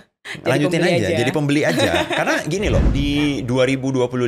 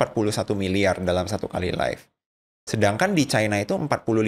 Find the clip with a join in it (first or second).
first